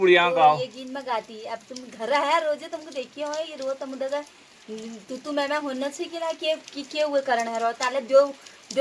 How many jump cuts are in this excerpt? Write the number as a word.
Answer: zero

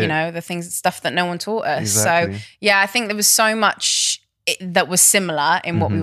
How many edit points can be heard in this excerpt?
zero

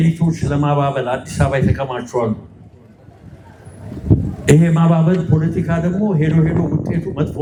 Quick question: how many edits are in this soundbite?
zero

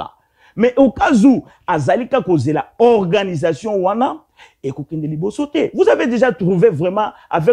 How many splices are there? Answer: zero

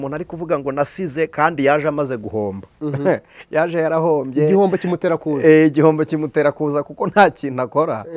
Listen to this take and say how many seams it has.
zero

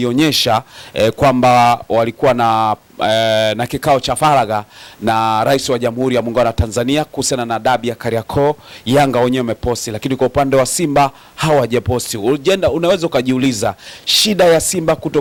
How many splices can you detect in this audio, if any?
zero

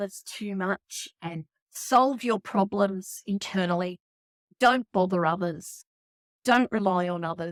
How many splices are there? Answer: zero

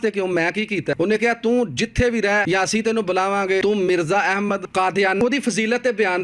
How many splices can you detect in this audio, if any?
four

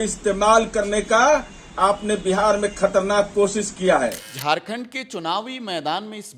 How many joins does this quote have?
one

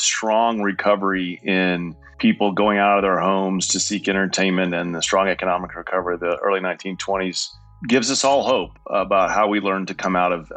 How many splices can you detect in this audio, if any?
two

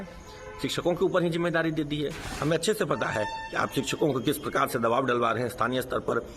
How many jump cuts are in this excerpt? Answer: one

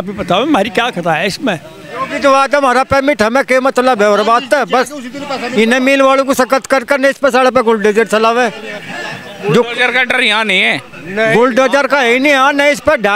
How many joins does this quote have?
one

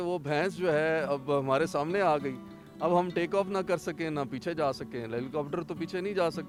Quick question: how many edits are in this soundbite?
zero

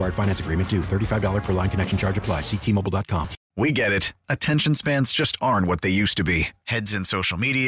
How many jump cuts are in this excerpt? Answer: one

